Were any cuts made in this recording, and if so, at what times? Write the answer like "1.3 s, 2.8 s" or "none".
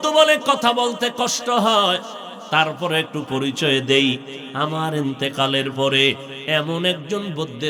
none

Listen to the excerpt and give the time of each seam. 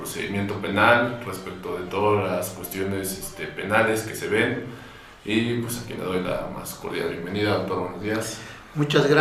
6.3 s

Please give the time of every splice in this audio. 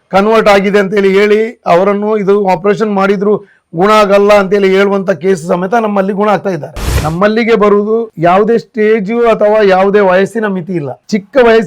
6.8 s

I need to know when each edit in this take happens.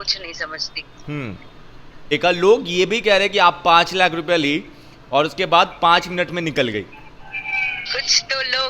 2.0 s

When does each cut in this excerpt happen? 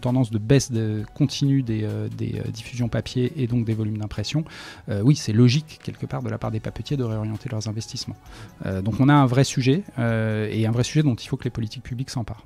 none

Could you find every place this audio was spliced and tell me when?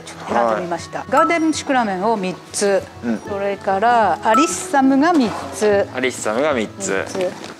none

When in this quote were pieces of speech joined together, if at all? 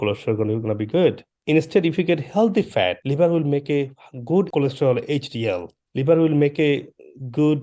1.3 s, 3.0 s, 4.5 s, 5.8 s

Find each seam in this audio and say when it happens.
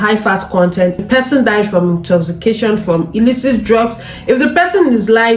1.0 s, 4.1 s

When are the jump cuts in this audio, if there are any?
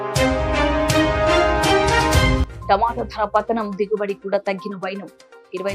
2.4 s

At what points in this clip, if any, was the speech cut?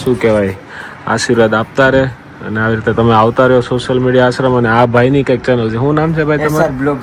none

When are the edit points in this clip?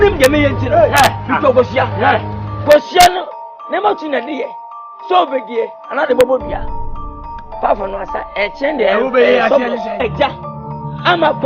10.0 s

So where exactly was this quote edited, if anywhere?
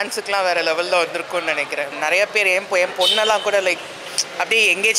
1.9 s

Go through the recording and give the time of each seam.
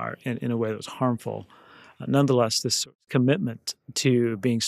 2.9 s

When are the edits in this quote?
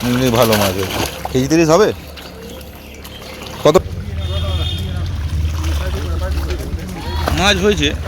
3.8 s

